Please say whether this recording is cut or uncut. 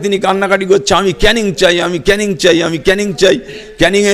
uncut